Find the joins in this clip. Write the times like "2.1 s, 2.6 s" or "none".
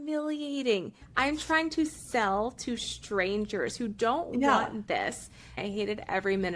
1.0 s, 5.5 s